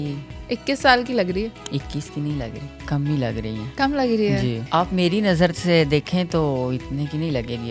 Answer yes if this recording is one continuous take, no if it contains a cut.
no